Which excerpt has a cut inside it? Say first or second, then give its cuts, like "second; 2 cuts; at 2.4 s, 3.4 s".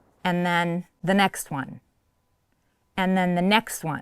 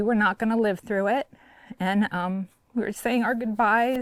first; 1 cut; at 0.9 s